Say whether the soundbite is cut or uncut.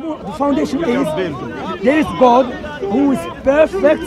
uncut